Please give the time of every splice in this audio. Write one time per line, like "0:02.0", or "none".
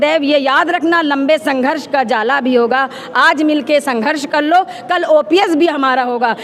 none